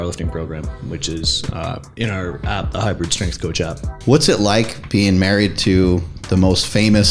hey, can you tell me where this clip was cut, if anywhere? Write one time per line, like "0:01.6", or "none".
0:03.9